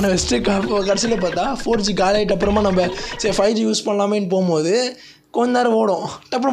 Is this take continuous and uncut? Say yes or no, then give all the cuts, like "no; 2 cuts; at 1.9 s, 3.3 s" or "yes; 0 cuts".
yes; 0 cuts